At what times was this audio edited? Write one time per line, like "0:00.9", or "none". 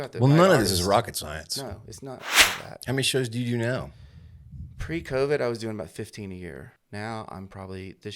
0:02.5
0:06.7